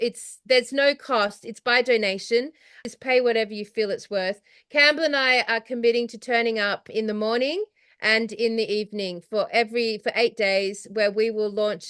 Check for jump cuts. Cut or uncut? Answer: cut